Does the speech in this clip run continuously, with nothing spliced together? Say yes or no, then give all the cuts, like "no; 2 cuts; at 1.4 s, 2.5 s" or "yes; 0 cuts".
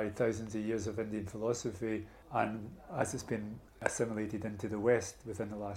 no; 2 cuts; at 2.1 s, 3.8 s